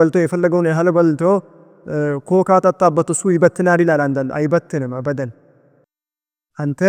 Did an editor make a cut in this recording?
no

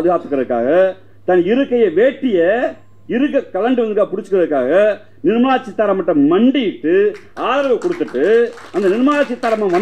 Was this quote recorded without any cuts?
yes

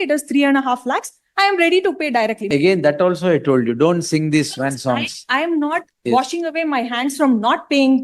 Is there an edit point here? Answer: yes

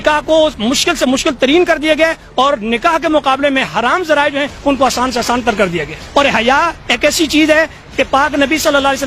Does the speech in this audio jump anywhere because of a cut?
yes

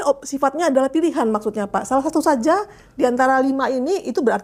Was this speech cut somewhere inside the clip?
no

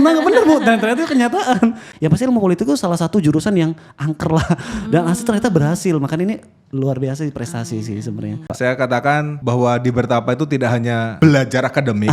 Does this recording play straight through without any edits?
no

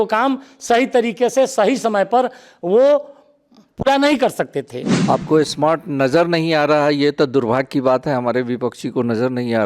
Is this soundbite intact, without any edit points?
no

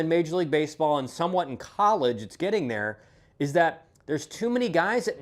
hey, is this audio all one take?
yes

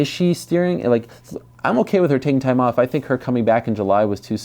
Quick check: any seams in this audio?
no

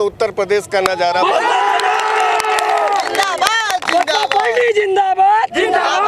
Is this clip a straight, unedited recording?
yes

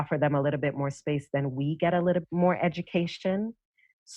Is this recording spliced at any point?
yes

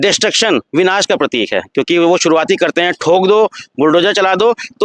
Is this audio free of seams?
yes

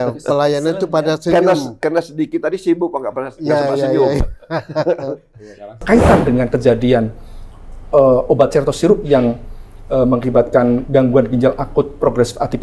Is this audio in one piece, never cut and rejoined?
no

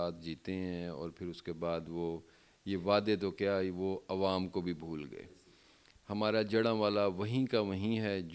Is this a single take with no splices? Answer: yes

